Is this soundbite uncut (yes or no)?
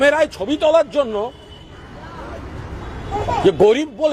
yes